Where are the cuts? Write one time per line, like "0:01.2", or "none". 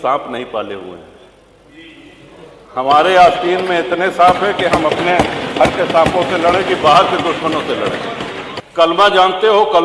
0:08.5